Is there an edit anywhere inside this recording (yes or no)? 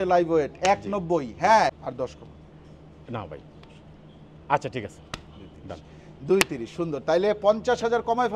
yes